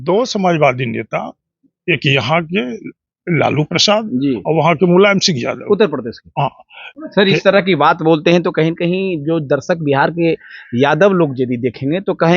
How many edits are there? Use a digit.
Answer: 1